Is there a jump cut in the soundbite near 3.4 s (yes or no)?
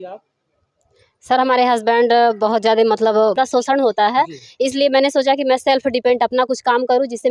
yes